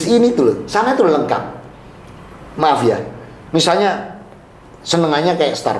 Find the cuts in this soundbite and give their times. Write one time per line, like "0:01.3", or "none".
none